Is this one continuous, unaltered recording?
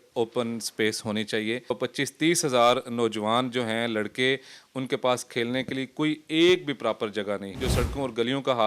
no; 2 cuts; at 1.8 s, 7.6 s

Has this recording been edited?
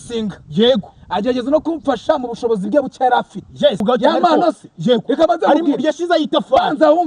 yes; 1 cut; at 3.8 s

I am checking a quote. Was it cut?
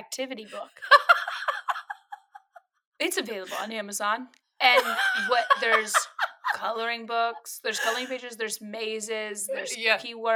no; 0 cuts

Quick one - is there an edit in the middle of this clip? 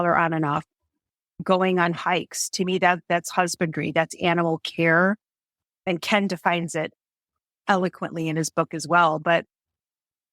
yes; 1 cut; at 7.6 s

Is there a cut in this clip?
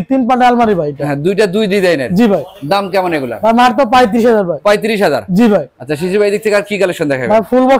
no; 0 cuts

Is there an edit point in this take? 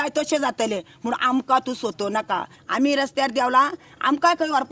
yes; 1 cut; at 2.6 s

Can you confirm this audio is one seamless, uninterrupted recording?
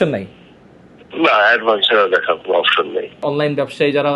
no; 1 cut; at 3.2 s

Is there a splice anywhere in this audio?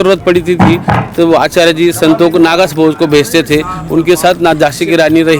no; 0 cuts

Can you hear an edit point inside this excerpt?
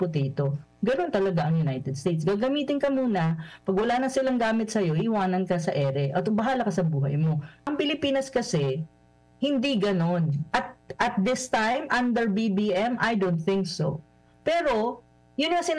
yes; 1 cut; at 7.7 s

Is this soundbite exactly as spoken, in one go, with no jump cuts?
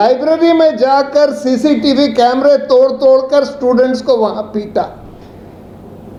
yes; 0 cuts

